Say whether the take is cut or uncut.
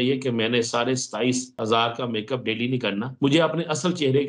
cut